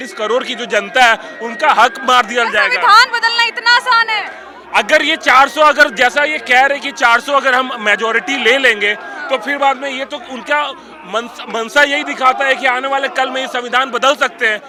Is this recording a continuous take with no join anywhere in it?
yes; 0 cuts

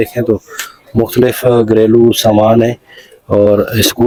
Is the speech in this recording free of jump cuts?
yes; 0 cuts

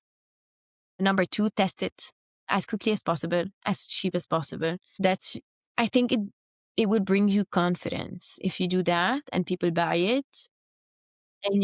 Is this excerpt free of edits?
no; 1 cut; at 4.9 s

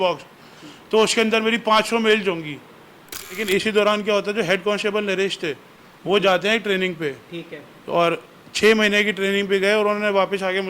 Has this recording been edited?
yes; 1 cut; at 3.4 s

